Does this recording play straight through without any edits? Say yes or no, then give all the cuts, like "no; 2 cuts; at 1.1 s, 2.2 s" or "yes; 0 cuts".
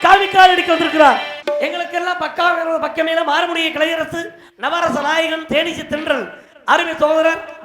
no; 1 cut; at 1.3 s